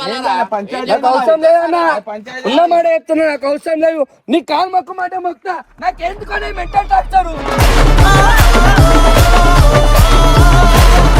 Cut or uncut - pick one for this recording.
uncut